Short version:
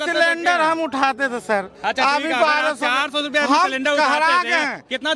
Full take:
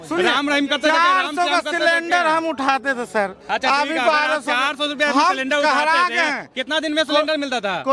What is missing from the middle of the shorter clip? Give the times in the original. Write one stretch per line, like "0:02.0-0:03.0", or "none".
none